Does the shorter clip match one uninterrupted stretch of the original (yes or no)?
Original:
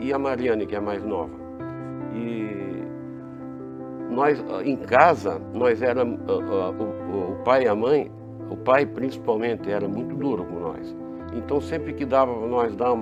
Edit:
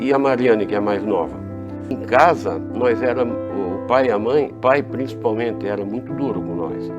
no